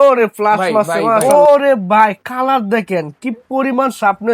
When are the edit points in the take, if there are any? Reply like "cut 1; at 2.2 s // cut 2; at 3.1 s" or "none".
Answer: cut 1; at 1.2 s